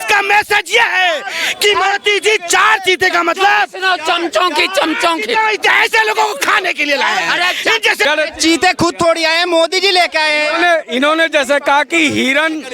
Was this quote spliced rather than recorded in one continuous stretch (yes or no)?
yes